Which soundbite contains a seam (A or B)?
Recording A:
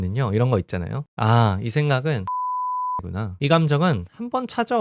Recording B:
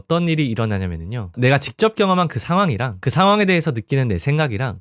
A